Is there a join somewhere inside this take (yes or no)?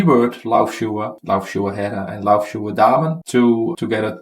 yes